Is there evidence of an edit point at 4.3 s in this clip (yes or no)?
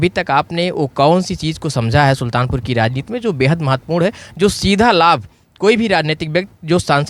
no